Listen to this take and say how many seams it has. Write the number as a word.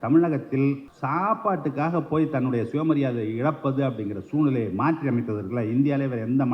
one